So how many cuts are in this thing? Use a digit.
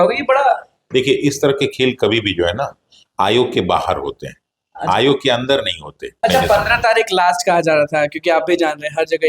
1